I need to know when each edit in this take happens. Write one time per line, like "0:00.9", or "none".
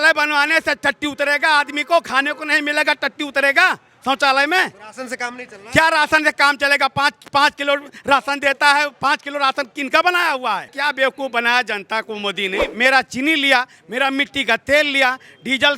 0:10.7
0:12.7